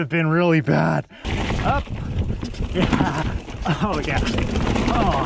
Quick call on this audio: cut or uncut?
cut